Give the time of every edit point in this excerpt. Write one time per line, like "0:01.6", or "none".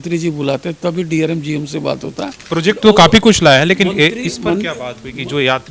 0:02.4